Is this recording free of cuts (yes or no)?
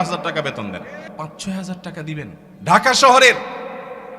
no